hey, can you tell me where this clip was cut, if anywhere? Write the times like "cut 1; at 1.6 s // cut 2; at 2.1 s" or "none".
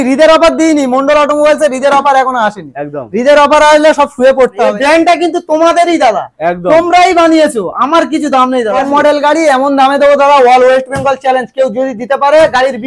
cut 1; at 4.7 s // cut 2; at 8.8 s